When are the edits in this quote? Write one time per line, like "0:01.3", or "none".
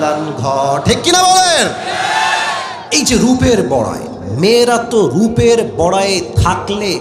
0:02.8